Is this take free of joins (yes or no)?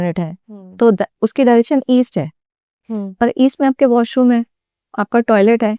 yes